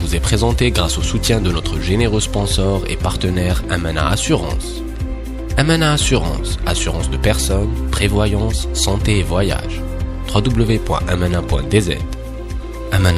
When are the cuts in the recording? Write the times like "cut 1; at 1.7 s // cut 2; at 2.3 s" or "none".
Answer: none